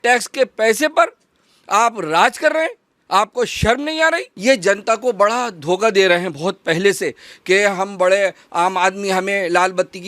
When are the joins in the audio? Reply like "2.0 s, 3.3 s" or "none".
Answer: 4.3 s